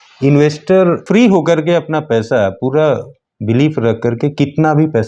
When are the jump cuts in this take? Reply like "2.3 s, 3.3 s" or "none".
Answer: 1.0 s